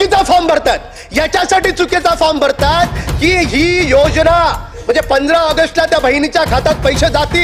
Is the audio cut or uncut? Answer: uncut